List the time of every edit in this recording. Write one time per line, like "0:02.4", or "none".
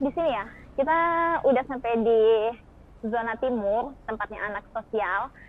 none